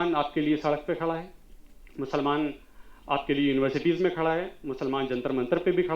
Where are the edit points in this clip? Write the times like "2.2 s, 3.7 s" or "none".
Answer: none